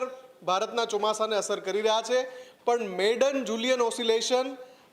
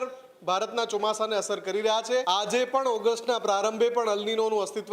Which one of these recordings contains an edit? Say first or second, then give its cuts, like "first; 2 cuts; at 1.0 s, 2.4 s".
second; 1 cut; at 2.2 s